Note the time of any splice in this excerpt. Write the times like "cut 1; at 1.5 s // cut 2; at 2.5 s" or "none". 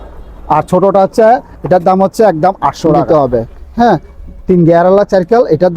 cut 1; at 3.0 s